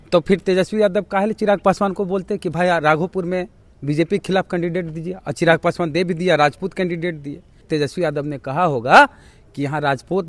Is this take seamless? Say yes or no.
no